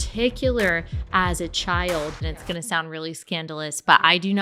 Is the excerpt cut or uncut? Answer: cut